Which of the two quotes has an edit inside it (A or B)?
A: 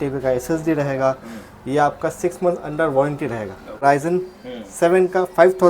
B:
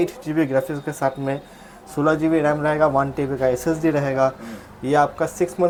A